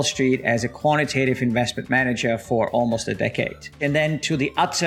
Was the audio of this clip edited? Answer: yes; 1 cut; at 3.8 s

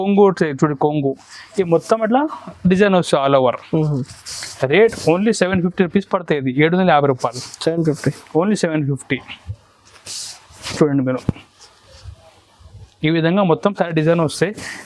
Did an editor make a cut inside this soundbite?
no; 0 cuts

